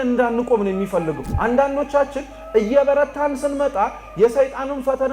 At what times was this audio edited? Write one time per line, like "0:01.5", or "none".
0:01.2